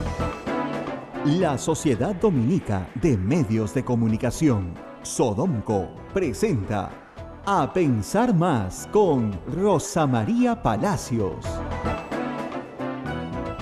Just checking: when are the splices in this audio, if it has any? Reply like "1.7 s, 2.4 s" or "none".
1.0 s